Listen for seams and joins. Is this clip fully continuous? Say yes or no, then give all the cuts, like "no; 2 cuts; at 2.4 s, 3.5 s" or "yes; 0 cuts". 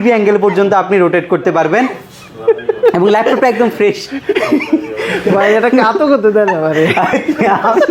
yes; 0 cuts